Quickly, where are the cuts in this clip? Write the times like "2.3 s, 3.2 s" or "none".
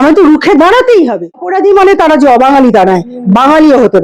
1.5 s